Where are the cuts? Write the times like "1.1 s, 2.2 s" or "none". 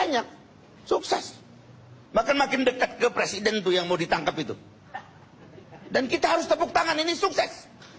none